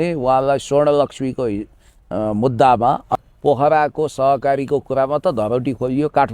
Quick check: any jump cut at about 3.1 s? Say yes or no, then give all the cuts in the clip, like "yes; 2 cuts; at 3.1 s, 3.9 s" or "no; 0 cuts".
yes; 1 cut; at 3.1 s